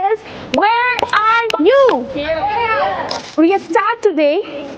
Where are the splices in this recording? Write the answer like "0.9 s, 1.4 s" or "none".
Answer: 3.1 s